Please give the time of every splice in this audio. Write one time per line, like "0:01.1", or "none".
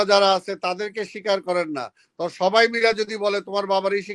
none